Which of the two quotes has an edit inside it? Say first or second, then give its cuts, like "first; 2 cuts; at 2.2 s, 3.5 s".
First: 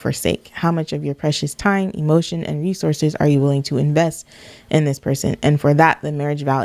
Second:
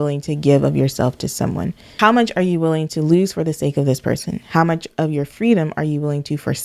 second; 1 cut; at 1.9 s